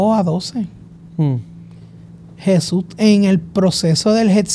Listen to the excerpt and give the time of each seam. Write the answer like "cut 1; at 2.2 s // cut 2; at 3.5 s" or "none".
none